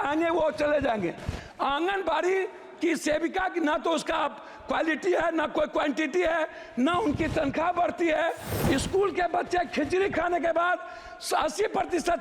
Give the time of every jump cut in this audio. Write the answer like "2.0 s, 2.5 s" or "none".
8.5 s